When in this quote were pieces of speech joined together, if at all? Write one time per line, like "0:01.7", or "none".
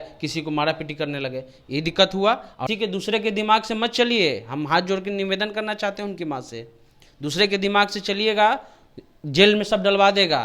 0:02.6